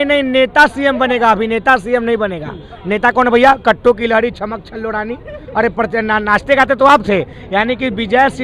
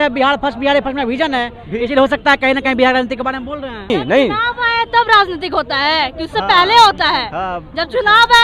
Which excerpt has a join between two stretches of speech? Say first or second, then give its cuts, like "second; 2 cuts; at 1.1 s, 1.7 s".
second; 1 cut; at 3.9 s